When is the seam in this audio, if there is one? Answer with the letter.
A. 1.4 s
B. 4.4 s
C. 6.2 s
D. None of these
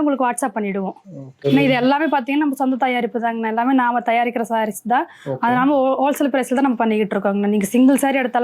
A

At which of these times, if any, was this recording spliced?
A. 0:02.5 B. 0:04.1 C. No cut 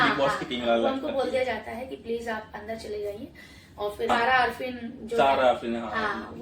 B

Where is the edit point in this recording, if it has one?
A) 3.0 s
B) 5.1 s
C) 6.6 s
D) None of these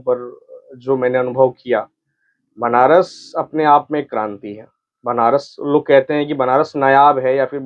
D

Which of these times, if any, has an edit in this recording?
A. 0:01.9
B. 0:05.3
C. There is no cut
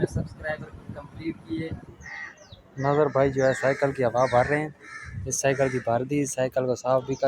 A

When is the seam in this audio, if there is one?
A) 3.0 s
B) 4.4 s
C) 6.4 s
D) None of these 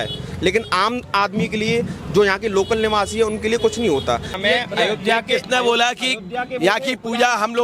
B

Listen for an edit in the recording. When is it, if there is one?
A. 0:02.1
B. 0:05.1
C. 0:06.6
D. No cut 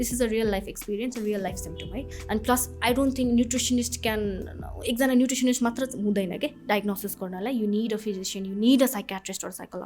A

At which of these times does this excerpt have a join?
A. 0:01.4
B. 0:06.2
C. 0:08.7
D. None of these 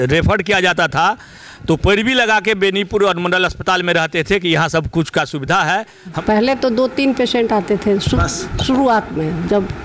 B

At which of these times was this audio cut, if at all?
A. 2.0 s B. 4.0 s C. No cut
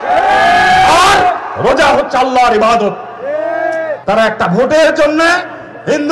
B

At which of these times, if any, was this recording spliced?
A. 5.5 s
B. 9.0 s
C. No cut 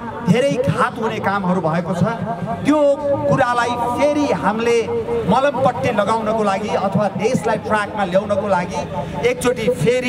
C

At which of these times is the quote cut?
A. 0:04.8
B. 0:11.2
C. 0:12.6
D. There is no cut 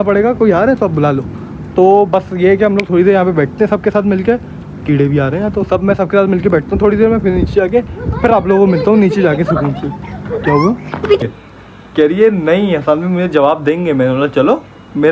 B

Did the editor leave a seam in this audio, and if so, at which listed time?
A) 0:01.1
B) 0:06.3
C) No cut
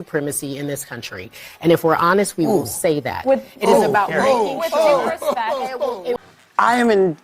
B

